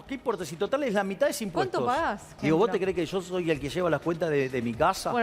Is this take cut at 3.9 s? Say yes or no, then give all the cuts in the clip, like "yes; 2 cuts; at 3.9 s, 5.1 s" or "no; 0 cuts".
no; 1 cut; at 2.3 s